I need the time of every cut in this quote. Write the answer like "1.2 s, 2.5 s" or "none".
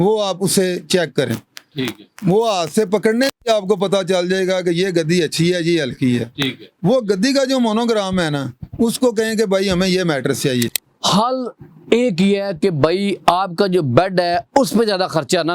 10.8 s